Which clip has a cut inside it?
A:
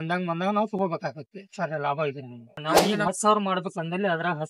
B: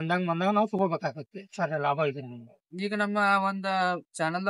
A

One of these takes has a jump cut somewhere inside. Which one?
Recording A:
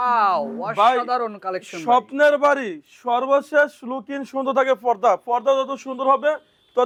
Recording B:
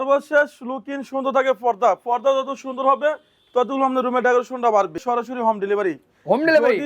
B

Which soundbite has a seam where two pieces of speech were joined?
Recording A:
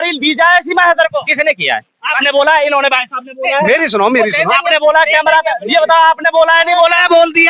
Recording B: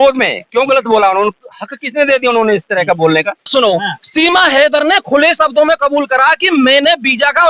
B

